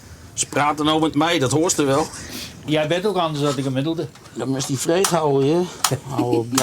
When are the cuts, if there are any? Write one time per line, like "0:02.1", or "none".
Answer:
0:02.7

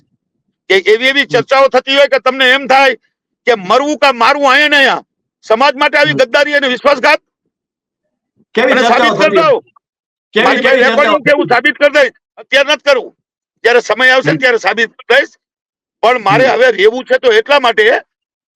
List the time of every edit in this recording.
none

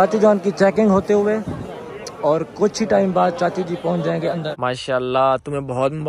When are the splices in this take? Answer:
0:04.5

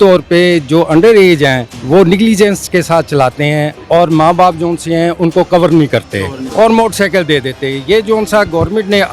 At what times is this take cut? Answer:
0:01.7
0:03.8
0:06.4

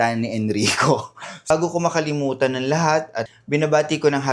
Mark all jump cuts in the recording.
0:01.5
0:03.2

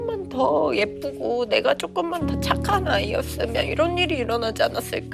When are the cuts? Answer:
none

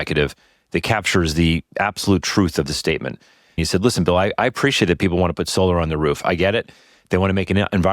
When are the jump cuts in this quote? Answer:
0:03.6

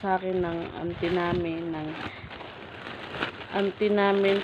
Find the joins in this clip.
none

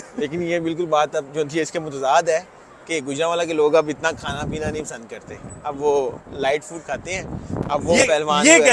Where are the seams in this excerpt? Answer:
none

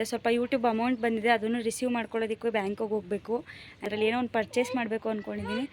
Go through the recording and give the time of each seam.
0:03.9

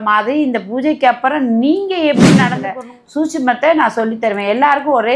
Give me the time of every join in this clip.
0:02.6

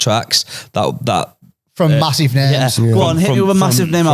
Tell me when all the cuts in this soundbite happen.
none

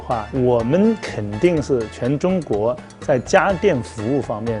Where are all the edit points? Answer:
none

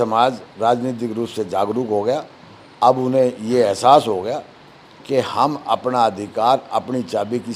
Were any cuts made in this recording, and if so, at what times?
none

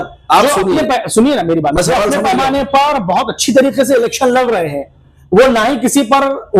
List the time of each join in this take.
none

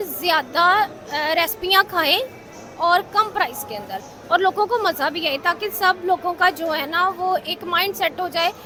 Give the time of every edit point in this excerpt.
none

